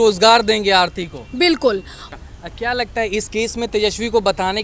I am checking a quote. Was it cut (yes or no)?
no